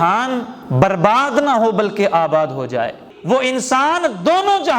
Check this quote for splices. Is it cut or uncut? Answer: cut